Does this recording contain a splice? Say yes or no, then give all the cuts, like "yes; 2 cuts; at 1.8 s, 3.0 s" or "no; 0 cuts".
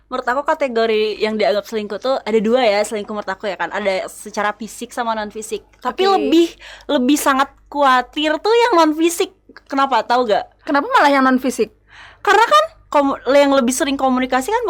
no; 0 cuts